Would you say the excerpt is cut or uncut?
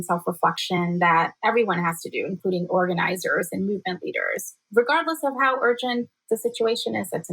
uncut